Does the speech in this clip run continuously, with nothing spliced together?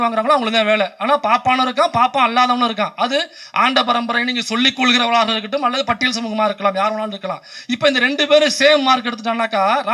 yes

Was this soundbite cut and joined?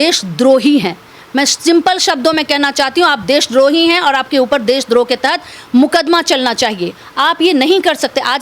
no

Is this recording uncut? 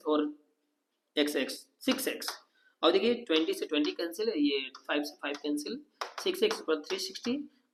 yes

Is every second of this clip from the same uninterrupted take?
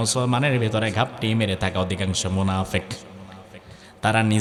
yes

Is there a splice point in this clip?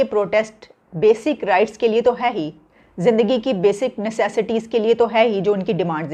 no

